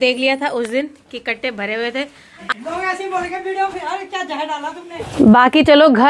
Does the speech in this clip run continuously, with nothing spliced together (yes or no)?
no